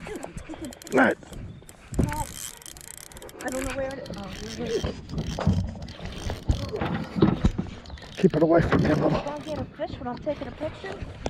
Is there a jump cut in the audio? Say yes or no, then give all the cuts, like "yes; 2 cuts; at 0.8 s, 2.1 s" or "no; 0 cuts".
no; 0 cuts